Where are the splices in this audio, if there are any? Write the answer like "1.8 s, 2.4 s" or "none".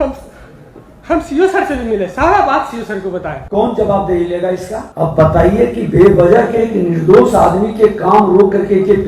3.4 s, 4.8 s